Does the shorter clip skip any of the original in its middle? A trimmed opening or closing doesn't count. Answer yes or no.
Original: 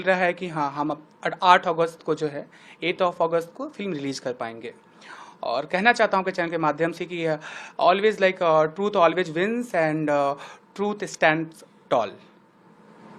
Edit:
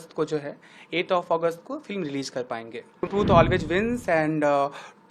yes